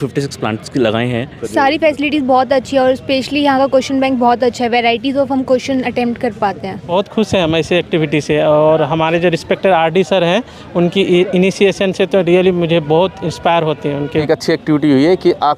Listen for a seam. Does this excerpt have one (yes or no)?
yes